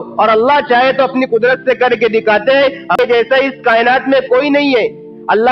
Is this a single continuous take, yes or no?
no